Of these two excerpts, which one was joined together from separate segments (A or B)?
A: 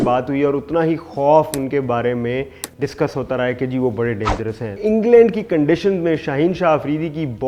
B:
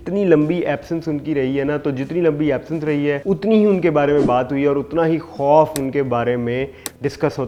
A